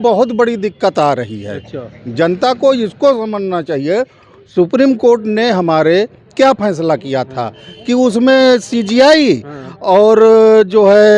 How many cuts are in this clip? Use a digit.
0